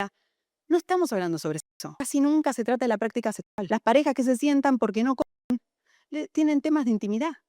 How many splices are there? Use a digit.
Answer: 2